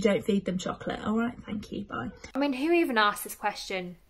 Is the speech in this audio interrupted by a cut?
yes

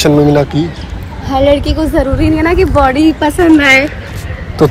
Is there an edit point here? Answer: no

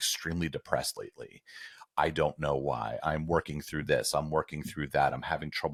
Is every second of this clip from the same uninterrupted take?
yes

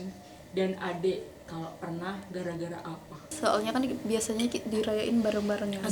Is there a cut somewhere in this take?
yes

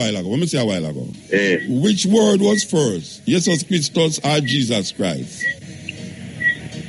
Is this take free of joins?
no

